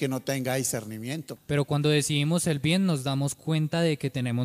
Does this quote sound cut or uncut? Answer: cut